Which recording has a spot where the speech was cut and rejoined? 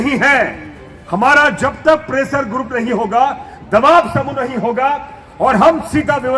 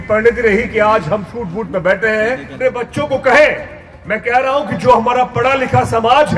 second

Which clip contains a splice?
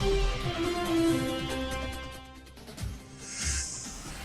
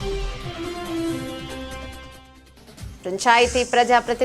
second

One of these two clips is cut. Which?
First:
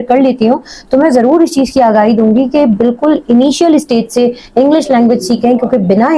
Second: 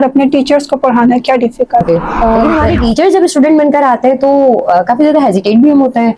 second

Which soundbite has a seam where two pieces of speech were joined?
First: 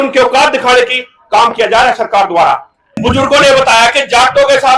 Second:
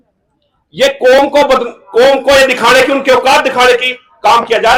first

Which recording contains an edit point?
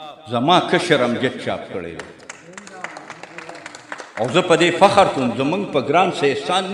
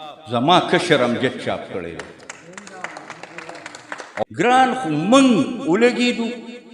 second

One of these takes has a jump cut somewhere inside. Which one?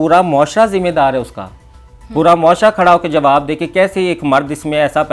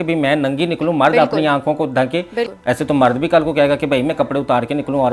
second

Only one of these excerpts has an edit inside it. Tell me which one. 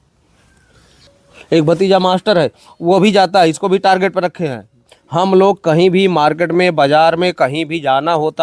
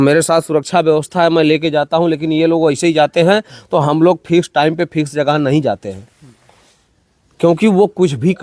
first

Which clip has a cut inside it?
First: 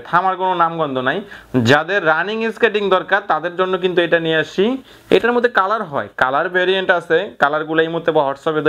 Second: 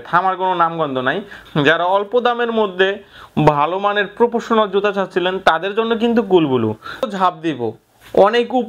second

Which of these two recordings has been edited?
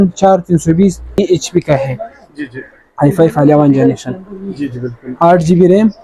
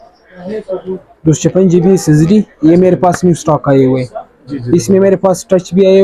first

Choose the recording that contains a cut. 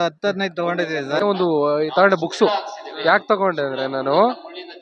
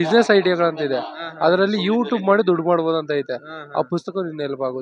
first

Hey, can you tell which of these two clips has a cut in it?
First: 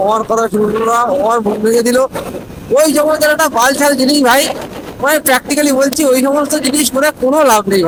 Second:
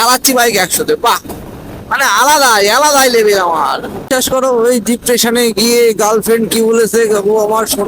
second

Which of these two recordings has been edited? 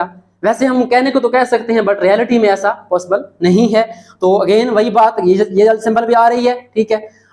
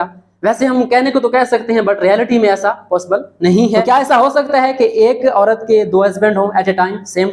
second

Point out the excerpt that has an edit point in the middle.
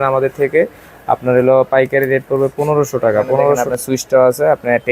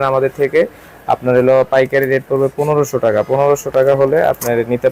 first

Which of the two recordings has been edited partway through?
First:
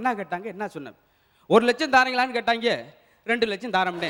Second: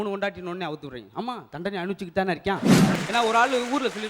second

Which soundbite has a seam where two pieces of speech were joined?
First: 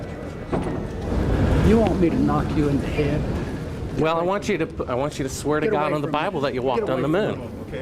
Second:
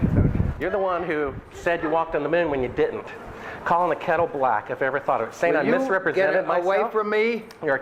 first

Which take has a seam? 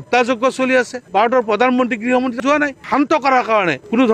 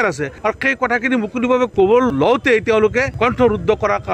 first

